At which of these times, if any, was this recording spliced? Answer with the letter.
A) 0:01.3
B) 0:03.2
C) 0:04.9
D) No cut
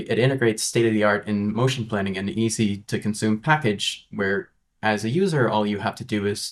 D